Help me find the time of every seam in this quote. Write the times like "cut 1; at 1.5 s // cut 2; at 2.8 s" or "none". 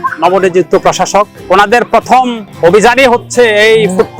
cut 1; at 1.4 s // cut 2; at 2.4 s